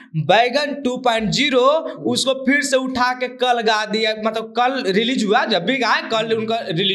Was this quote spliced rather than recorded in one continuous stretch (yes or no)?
no